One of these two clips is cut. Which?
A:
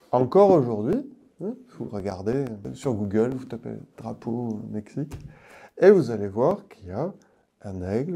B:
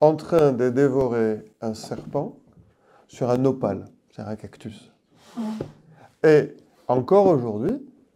A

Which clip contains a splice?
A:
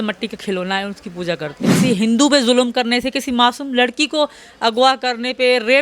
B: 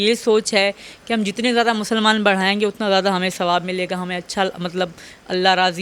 A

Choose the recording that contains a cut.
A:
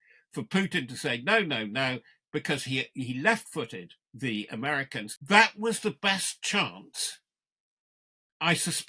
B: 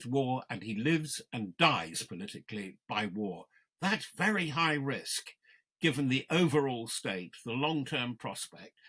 A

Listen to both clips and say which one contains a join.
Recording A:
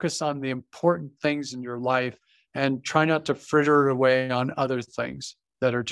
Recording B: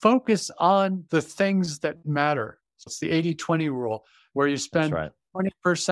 B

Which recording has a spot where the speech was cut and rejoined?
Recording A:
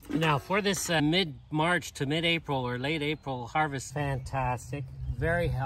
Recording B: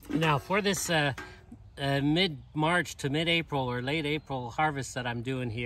A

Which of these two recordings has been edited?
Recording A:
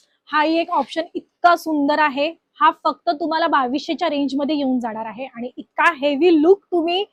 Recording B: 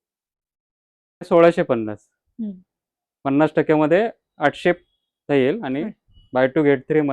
B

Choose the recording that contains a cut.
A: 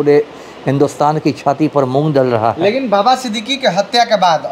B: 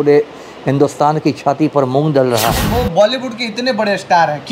B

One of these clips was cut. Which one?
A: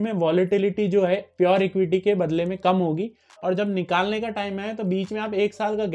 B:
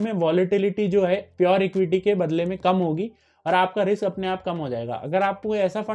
A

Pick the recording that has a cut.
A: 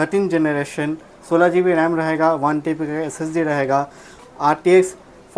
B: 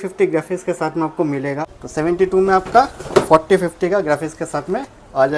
B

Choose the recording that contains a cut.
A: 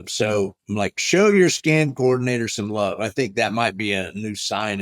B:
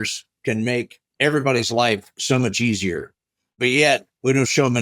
B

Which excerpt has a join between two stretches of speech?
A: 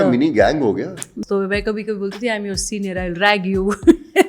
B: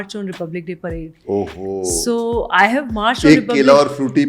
A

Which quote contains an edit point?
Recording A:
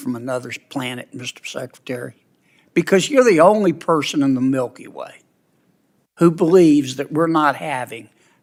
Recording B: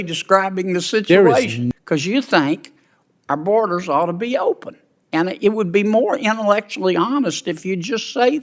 B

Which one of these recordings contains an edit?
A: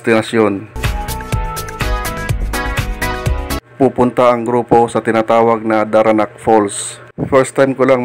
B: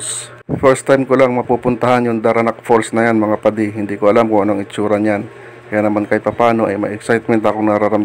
A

